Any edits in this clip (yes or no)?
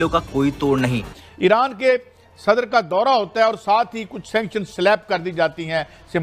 yes